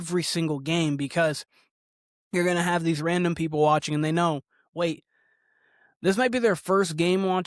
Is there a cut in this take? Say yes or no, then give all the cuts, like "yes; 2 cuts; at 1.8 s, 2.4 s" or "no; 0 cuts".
no; 0 cuts